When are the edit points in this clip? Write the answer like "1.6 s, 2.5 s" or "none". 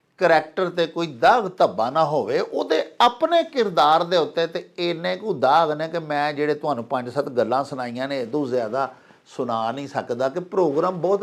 none